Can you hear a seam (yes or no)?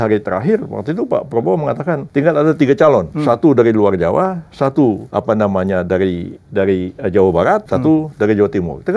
yes